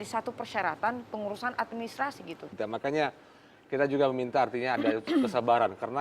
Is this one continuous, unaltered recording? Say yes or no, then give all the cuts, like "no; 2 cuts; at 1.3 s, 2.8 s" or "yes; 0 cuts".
no; 1 cut; at 2.5 s